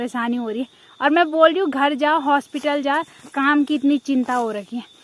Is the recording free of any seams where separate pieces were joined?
no; 1 cut; at 3.2 s

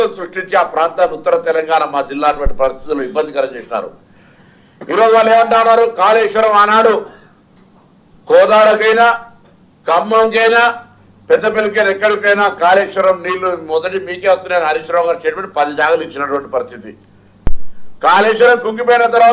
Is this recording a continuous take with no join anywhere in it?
yes; 0 cuts

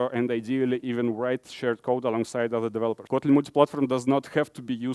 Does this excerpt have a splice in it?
yes; 1 cut; at 3.0 s

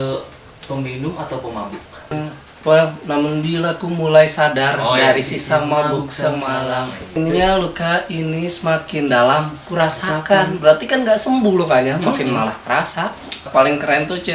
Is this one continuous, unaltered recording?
no; 3 cuts; at 2.1 s, 7.1 s, 13.5 s

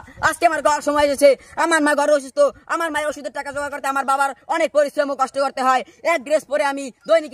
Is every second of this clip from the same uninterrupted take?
yes; 0 cuts

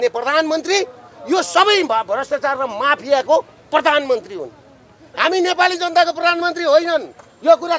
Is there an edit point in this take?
no; 0 cuts

